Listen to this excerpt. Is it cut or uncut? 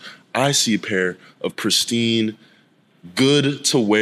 uncut